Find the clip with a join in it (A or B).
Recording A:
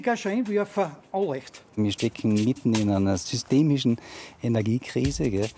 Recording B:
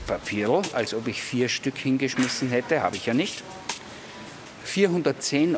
A